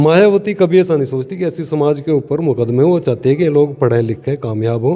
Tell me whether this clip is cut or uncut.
uncut